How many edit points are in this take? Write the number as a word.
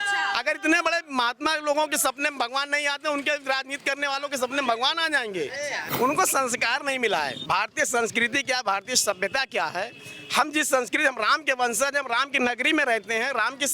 two